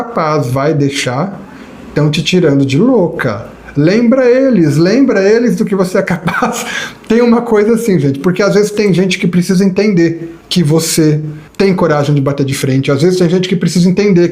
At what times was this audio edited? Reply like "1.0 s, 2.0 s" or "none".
10.3 s, 11.4 s